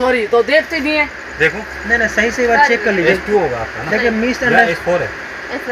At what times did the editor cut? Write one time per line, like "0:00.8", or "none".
none